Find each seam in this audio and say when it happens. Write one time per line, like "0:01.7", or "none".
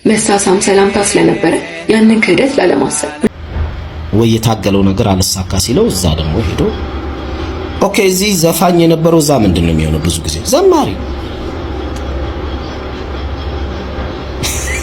0:03.3